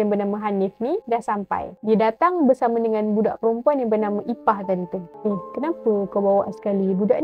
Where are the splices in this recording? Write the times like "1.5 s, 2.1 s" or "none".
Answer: 1.7 s, 5.0 s